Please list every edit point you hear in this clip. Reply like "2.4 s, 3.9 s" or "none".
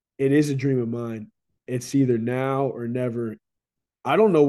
1.3 s, 3.4 s